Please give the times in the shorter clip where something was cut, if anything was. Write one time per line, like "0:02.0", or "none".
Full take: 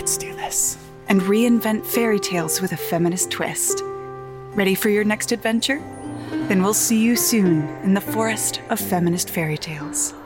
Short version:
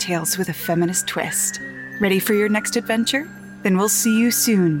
0:01.4
0:03.5